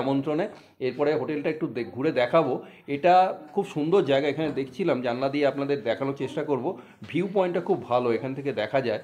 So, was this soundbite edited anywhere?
no; 0 cuts

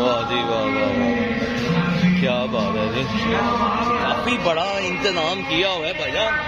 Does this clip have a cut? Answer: no; 0 cuts

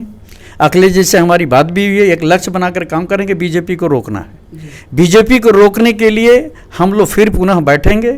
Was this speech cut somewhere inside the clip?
no; 0 cuts

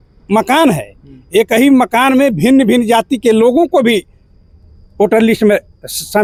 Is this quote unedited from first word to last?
yes; 0 cuts

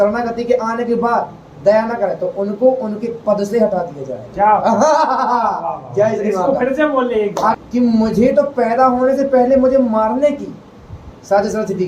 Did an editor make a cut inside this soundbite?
yes; 1 cut; at 7.5 s

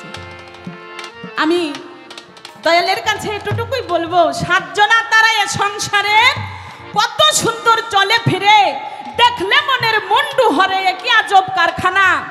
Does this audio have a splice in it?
no; 0 cuts

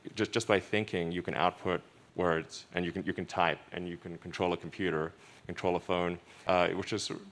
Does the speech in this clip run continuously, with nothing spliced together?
no; 2 cuts; at 2.0 s, 6.3 s

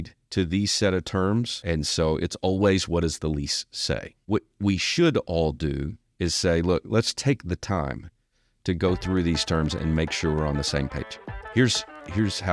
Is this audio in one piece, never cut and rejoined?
no; 2 cuts; at 1.6 s, 4.1 s

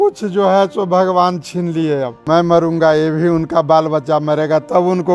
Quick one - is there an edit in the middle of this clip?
yes; 1 cut; at 2.2 s

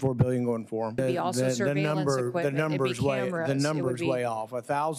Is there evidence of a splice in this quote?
yes; 1 cut; at 1.0 s

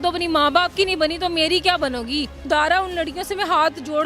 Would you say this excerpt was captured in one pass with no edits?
no; 1 cut; at 2.4 s

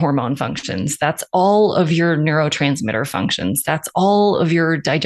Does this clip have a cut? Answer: no; 0 cuts

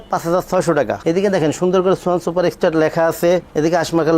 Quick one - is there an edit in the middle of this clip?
yes; 1 cut; at 1.0 s

